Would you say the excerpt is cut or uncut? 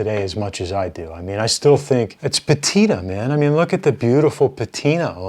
cut